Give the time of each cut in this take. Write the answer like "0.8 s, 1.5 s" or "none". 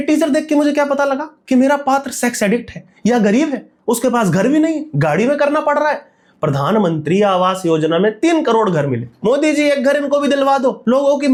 none

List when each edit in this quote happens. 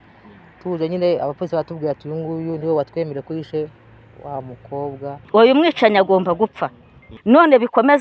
5.2 s

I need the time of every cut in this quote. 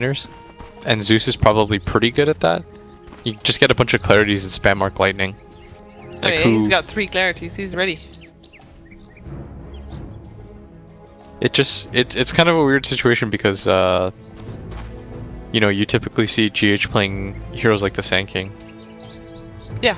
none

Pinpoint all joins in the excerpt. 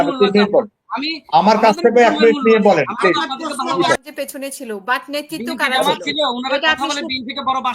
4.0 s

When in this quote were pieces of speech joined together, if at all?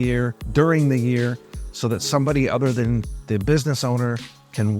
none

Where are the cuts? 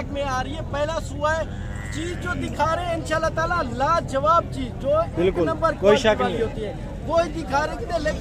none

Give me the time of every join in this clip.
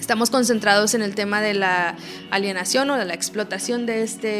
none

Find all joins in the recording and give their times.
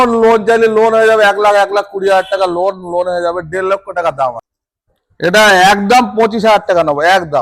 4.5 s

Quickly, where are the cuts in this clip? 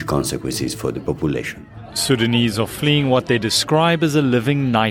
1.6 s

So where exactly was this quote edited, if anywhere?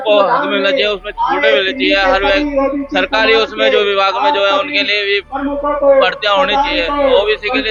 none

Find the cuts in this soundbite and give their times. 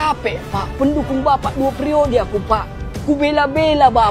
none

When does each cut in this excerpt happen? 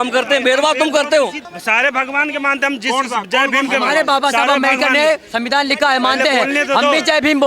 1.5 s

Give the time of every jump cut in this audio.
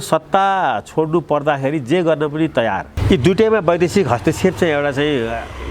2.9 s

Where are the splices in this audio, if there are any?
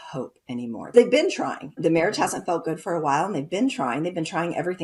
0.9 s, 1.8 s

